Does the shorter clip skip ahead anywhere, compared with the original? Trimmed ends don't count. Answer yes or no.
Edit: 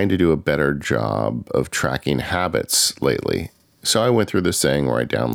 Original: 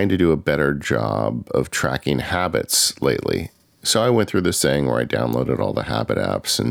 no